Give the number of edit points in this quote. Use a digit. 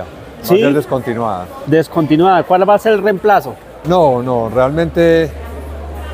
0